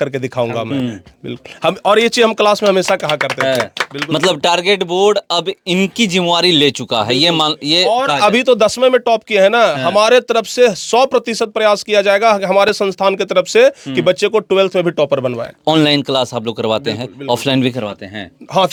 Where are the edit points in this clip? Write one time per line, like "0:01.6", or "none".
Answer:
none